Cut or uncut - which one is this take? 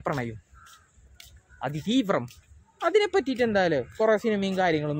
uncut